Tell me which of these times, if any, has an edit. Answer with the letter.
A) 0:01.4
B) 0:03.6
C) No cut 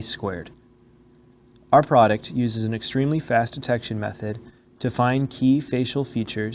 B